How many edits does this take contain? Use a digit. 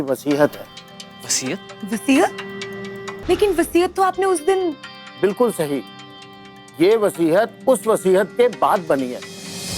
1